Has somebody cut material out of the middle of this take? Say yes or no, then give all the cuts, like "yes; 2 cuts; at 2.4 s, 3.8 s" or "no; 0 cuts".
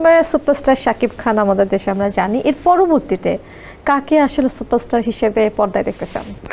no; 0 cuts